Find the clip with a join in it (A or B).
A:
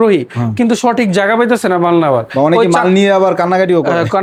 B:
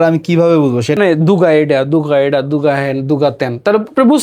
B